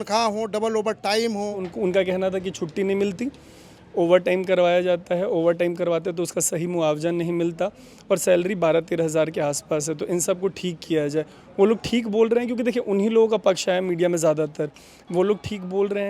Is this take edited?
yes; 1 cut; at 1.6 s

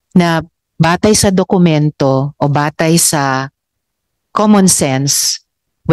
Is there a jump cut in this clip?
no; 0 cuts

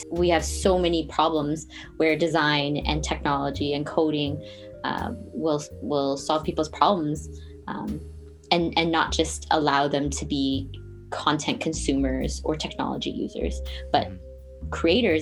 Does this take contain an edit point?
no; 0 cuts

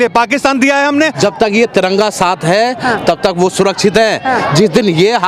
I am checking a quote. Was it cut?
yes; 1 cut; at 1.2 s

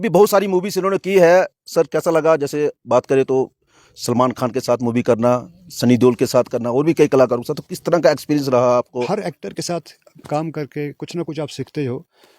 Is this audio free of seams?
no; 1 cut; at 9.0 s

